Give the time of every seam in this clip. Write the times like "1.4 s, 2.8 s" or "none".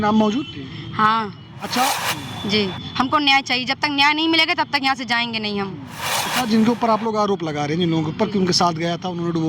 2.0 s, 6.1 s